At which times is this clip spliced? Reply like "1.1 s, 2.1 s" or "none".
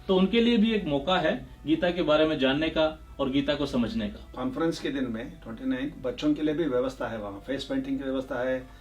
4.3 s